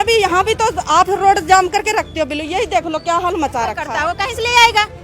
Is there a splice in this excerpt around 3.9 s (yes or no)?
yes